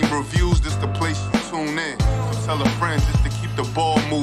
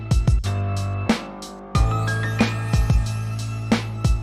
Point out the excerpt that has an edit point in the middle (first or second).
second